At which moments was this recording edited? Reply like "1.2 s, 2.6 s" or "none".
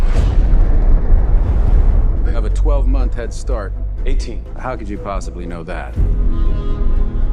2.2 s